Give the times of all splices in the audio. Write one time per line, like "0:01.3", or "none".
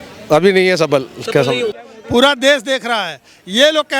0:01.7